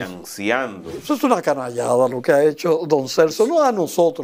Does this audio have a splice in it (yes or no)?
yes